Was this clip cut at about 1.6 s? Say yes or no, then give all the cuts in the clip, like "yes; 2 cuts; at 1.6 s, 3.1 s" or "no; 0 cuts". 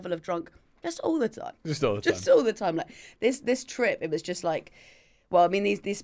no; 0 cuts